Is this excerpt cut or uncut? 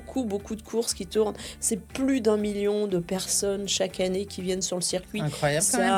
uncut